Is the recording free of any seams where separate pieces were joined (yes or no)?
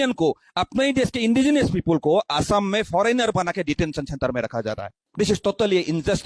no